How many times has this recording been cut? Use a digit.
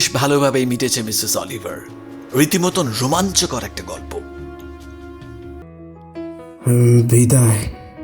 1